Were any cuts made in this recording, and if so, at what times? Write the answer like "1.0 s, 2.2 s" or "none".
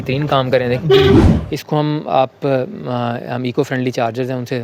1.3 s